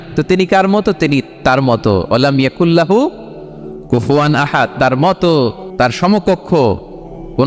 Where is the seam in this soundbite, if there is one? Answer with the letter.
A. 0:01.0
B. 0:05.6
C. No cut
B